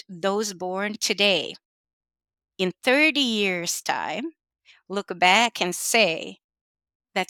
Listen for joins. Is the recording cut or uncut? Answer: uncut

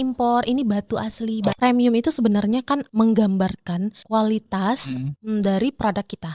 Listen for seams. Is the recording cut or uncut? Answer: cut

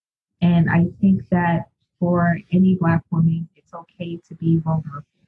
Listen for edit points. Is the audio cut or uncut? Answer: uncut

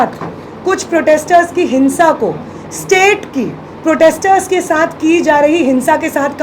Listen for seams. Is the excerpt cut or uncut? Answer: uncut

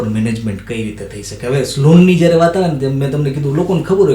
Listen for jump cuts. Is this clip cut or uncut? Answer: uncut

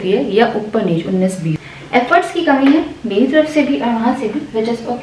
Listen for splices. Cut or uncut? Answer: cut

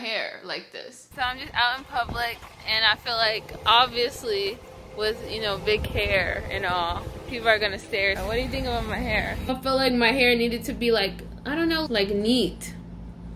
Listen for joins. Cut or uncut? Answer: cut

